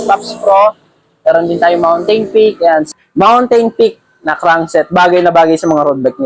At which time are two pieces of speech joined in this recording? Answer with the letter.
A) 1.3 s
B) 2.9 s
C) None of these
B